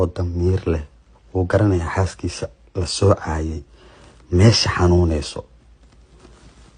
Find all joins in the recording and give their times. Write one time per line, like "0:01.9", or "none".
none

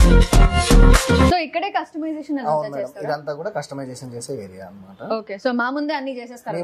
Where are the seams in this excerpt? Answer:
0:01.3

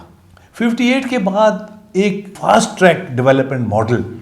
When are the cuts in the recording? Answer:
0:02.3

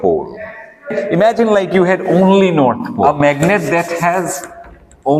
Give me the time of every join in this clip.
0:00.9
0:03.0

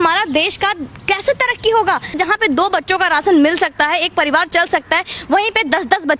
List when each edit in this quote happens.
0:02.1

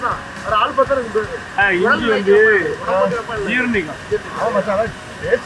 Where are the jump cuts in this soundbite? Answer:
0:01.6

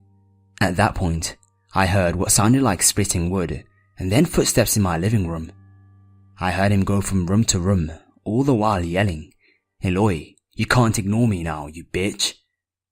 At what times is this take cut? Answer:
0:01.6

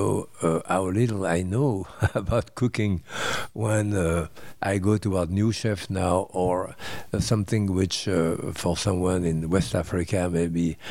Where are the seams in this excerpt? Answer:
none

